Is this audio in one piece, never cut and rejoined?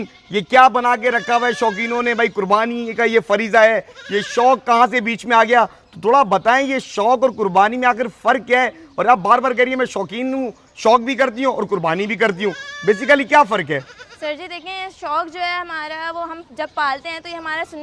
yes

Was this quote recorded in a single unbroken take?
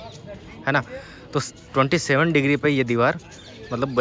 yes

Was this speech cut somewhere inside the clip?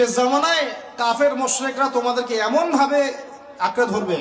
no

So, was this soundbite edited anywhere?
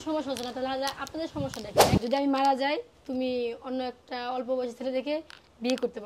yes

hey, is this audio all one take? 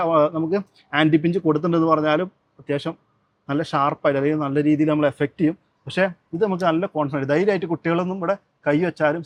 yes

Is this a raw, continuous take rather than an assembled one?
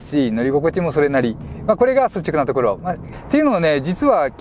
no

